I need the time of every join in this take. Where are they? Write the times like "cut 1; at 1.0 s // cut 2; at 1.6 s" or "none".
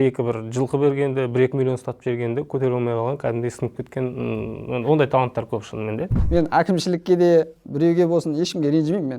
cut 1; at 6.1 s